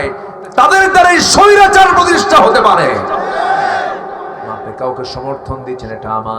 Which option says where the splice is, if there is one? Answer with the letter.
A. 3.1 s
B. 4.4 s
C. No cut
B